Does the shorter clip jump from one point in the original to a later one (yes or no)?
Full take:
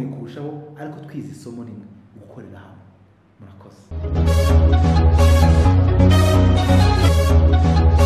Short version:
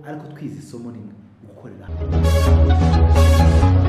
yes